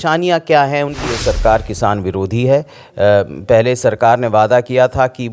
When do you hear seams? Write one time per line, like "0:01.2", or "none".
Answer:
0:01.1